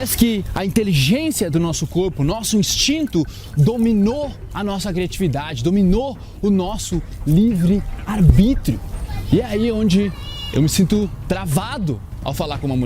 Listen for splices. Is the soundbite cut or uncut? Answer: cut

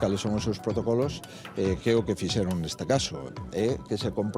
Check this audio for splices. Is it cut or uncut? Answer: cut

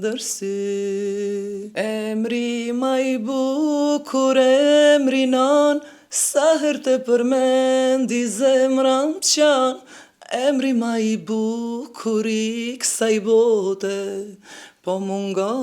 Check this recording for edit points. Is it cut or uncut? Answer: cut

